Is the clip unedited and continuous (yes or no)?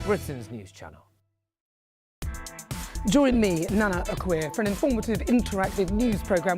no